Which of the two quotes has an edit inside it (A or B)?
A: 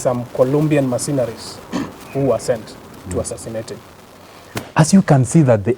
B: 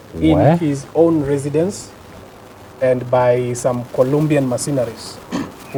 A